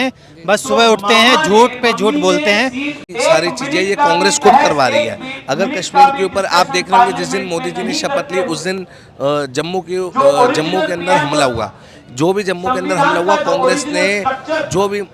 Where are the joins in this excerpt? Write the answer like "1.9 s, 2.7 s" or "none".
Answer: 3.0 s